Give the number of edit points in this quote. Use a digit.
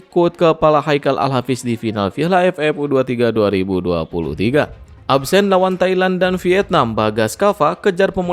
1